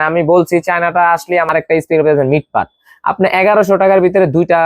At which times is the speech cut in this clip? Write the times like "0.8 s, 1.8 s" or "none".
1.5 s